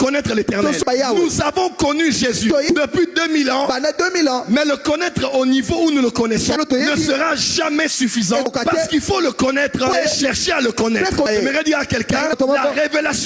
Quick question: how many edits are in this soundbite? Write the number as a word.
seven